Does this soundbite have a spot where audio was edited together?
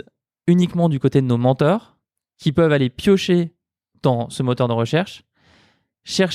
no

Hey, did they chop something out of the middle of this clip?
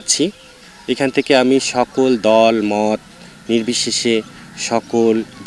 no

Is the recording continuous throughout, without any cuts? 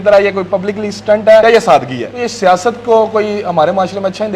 no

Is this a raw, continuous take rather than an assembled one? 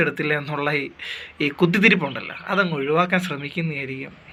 yes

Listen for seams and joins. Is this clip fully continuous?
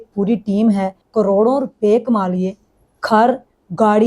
no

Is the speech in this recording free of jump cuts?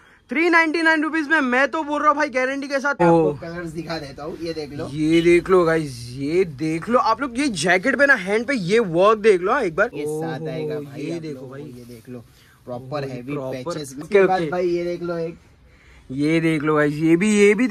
no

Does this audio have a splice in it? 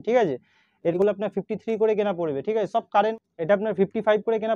yes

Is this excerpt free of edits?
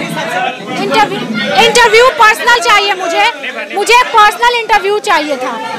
yes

